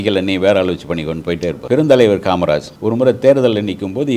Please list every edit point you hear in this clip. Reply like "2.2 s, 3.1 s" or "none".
1.6 s, 2.7 s